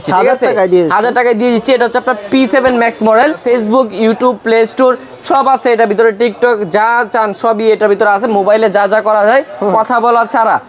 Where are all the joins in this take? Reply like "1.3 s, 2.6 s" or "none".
3.4 s

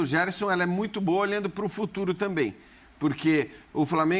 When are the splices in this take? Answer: none

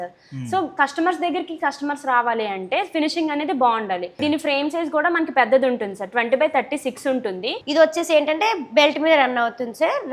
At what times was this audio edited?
4.1 s, 7.6 s

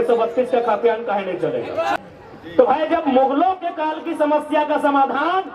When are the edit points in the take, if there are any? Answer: 2.0 s

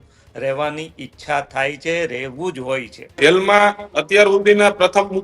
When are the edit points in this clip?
3.0 s

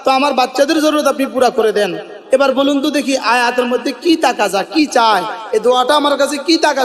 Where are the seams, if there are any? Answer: none

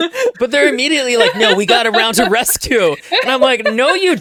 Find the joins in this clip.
none

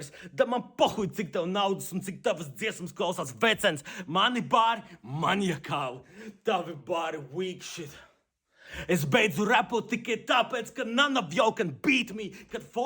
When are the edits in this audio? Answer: 3.9 s, 8.4 s

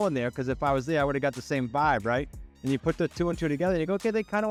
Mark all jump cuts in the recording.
none

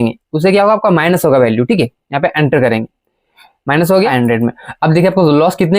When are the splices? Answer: 4.1 s

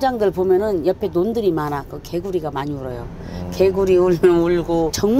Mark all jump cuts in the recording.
none

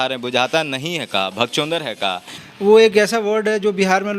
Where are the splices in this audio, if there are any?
2.4 s

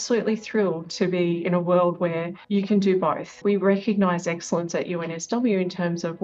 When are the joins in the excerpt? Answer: 2.3 s, 3.3 s

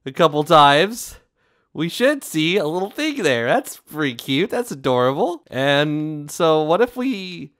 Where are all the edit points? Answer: none

